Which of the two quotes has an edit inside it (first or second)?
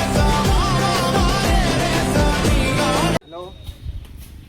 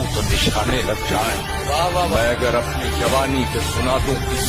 first